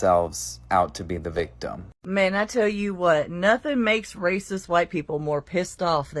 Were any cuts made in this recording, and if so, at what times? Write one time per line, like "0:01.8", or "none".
0:01.9